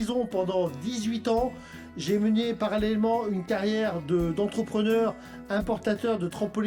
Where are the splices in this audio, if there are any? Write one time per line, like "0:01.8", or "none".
none